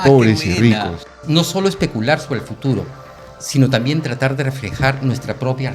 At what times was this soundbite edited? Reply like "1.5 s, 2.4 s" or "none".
1.2 s